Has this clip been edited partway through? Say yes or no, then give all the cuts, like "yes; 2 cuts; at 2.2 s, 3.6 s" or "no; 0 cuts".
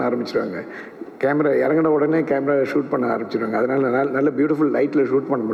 no; 0 cuts